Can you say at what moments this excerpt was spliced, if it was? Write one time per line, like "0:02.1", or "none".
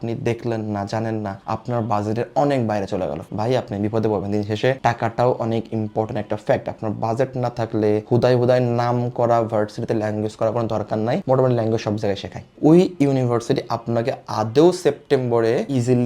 0:12.5

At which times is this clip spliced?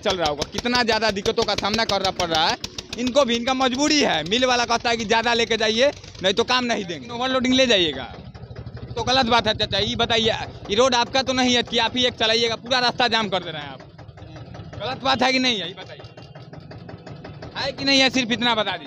0:07.0

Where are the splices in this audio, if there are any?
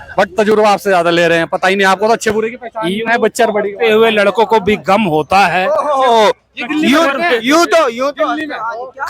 none

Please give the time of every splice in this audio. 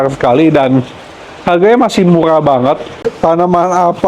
0:02.9

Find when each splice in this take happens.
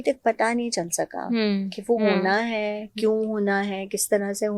none

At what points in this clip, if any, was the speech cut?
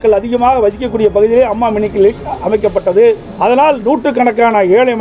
0:03.3

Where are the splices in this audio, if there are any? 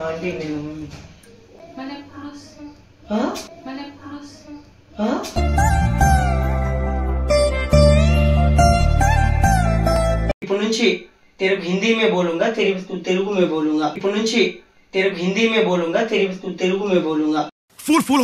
none

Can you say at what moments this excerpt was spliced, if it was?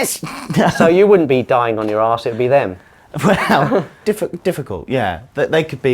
0:03.9

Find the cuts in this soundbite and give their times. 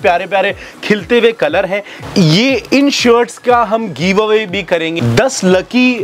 0:01.9
0:05.0

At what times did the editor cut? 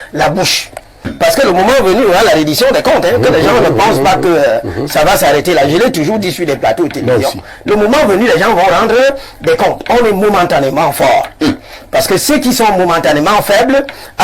0:01.1

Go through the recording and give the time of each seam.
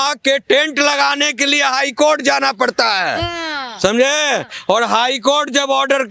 none

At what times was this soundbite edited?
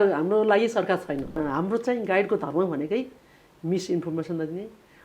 0:01.4

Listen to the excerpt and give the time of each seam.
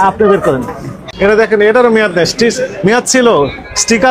0:01.3

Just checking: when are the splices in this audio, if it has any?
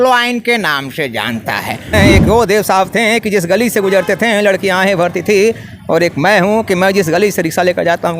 0:01.9

